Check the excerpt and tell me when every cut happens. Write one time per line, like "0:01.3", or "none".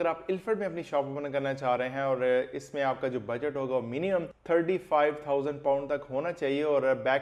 none